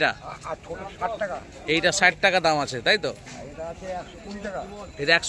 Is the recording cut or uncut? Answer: uncut